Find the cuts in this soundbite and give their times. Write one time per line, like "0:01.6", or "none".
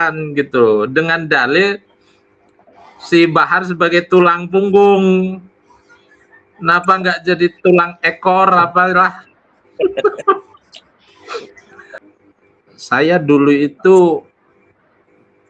0:12.0